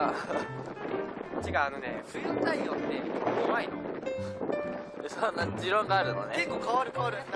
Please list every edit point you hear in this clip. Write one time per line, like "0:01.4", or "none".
none